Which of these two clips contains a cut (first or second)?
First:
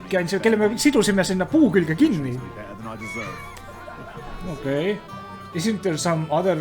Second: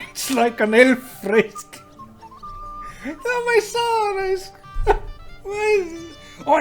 first